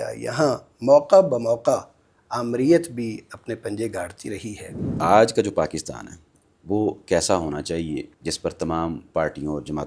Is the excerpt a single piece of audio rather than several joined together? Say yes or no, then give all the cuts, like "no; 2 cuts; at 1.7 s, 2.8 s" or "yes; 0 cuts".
no; 2 cuts; at 4.8 s, 8.1 s